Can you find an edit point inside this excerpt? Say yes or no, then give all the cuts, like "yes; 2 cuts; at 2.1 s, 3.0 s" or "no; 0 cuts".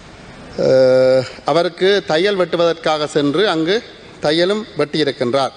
no; 0 cuts